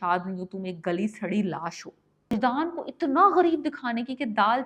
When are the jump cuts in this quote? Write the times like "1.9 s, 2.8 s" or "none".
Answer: 2.3 s